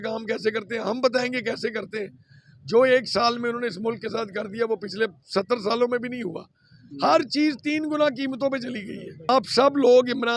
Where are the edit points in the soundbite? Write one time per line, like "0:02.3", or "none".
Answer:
0:09.3